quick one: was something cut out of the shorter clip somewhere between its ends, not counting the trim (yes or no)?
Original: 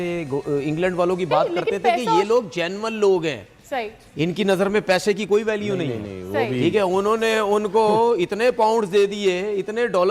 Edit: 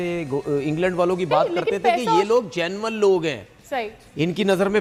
no